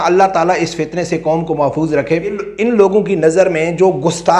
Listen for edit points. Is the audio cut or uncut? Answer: cut